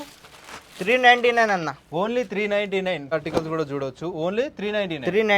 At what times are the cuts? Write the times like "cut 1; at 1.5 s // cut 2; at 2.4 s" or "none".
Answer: cut 1; at 3.1 s